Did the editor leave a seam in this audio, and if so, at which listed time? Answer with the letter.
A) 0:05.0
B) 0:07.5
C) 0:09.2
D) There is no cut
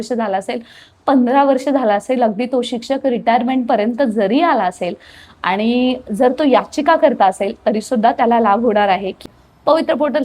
C